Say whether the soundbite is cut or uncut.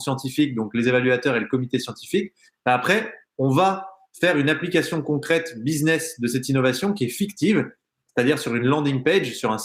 uncut